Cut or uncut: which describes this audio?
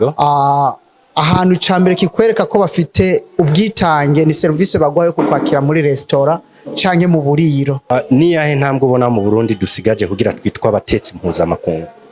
cut